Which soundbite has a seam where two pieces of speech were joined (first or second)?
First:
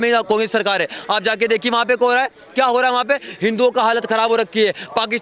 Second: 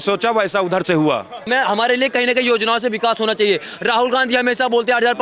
second